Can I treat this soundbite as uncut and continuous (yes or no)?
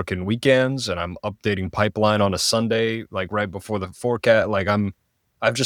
yes